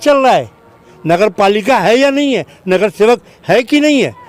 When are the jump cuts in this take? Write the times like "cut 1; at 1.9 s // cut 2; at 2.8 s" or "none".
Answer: none